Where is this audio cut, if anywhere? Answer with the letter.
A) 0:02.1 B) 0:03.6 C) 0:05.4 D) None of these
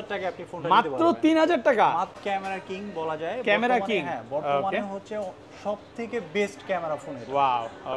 A